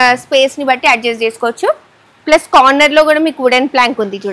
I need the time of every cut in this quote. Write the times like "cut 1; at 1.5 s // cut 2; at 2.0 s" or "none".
none